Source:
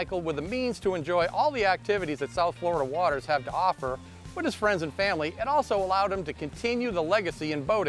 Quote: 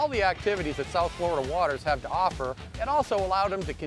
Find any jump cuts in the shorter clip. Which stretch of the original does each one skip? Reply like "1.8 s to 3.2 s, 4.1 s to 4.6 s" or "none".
4.2 s to 5.3 s